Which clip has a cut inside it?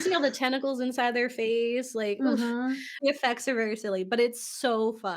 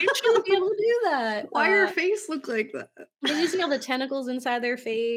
first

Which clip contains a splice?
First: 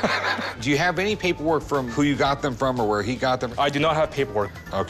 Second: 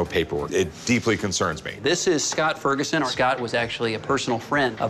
second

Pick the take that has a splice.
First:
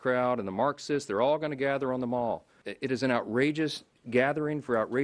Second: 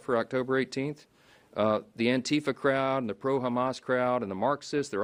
first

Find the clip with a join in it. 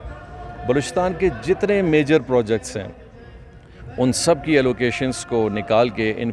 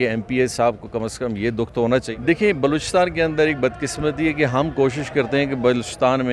second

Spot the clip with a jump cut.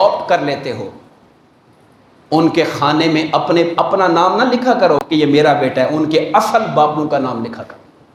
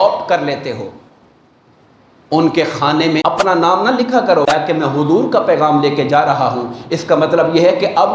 second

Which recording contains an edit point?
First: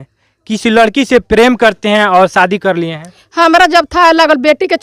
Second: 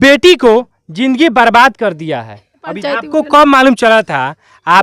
second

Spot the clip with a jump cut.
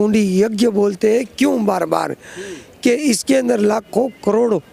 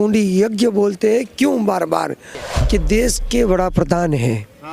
second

